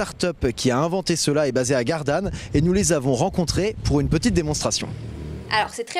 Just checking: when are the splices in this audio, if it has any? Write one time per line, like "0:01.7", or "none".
0:04.0